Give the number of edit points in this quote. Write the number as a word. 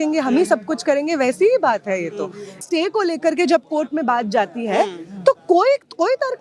one